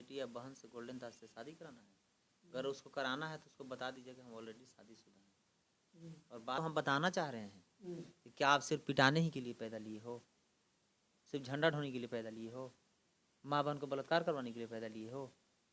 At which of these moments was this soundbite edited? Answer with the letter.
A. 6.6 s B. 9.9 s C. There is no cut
A